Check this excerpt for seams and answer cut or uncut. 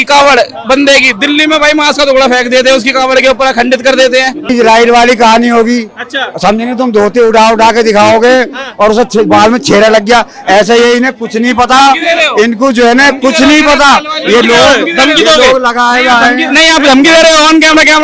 cut